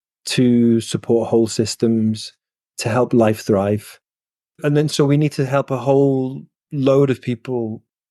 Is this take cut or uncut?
cut